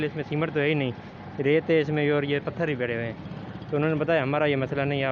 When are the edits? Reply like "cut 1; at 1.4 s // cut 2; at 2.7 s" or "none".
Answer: none